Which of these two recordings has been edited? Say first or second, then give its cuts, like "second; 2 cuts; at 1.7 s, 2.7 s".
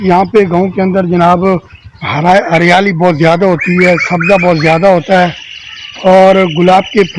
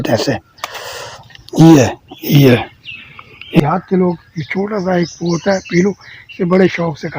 second; 1 cut; at 3.6 s